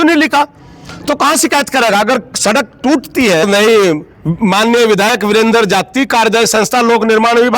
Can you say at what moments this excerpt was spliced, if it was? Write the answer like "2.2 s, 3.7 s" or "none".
3.4 s